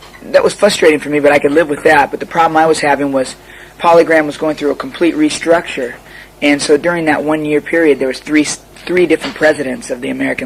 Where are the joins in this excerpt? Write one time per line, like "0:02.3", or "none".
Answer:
0:05.8